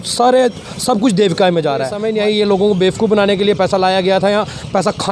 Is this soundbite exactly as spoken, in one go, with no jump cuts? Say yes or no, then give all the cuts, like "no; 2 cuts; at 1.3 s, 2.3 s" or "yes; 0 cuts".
no; 1 cut; at 2.0 s